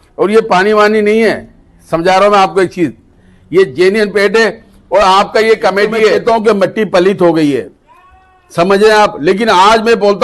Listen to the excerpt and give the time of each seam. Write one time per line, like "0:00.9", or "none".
0:06.2